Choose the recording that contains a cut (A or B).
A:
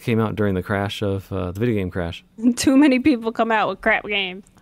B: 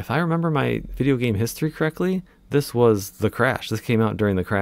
A